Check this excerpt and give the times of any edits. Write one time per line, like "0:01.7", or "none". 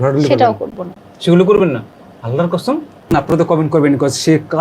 0:03.1